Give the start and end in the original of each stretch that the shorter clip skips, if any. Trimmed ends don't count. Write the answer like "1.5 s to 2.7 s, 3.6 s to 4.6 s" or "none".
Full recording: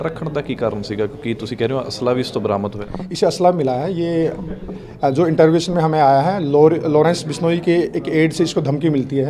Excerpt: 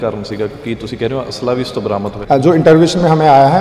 2.7 s to 4.9 s